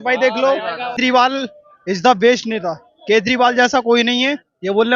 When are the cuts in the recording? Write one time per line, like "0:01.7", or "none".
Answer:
0:01.0